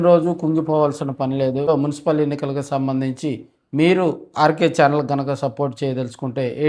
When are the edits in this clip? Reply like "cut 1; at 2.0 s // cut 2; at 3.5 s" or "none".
cut 1; at 1.7 s